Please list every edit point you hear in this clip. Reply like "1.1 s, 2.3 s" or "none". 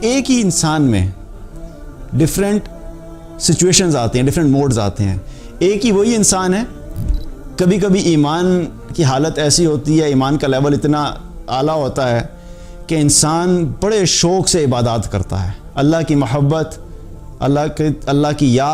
none